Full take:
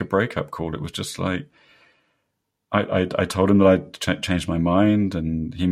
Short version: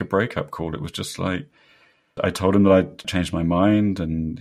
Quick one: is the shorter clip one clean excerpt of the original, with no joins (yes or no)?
no